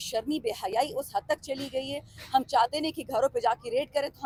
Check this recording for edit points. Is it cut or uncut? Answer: uncut